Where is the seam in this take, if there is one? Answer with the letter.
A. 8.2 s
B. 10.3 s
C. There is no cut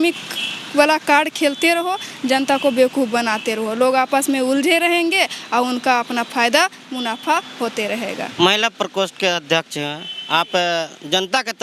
C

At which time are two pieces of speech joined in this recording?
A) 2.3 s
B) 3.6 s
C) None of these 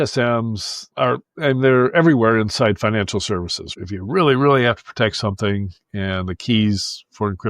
B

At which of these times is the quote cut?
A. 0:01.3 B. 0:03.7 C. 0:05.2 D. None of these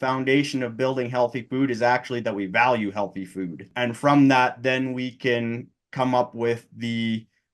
B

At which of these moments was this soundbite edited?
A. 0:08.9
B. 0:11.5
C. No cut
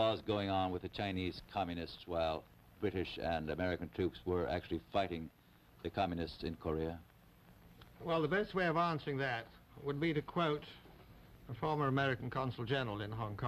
A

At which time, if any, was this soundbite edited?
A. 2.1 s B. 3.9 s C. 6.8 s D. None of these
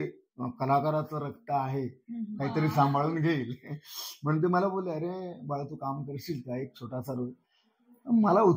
D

